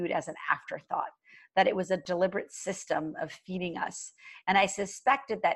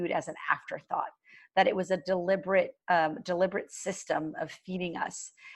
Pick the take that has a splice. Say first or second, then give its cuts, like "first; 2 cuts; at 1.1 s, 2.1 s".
first; 1 cut; at 2.0 s